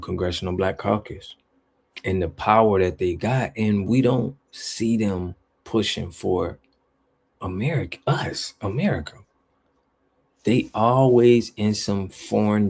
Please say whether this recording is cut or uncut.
uncut